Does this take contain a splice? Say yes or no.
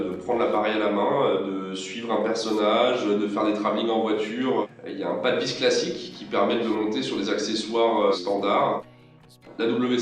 yes